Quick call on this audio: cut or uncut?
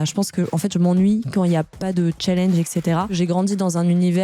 cut